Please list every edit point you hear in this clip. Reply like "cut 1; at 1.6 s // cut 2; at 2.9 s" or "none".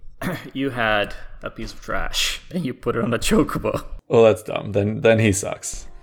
cut 1; at 3.9 s